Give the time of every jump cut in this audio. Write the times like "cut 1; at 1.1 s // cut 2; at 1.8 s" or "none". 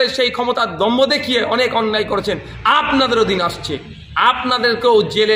none